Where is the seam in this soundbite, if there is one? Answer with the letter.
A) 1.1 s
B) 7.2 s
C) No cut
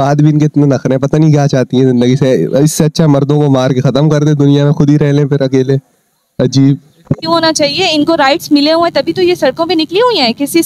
B